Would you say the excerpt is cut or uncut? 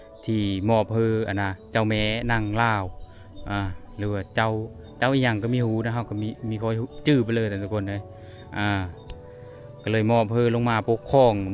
uncut